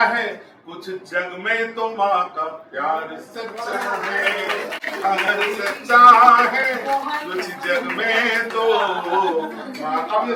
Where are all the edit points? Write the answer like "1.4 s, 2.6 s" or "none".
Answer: none